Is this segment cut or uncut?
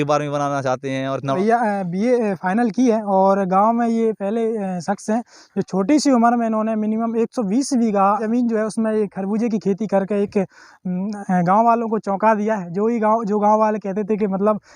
cut